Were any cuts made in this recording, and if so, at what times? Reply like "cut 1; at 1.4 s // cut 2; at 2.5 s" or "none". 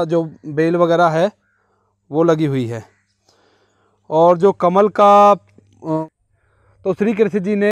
cut 1; at 6.1 s